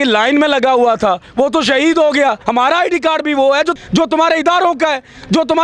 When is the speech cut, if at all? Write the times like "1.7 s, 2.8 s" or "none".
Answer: 2.4 s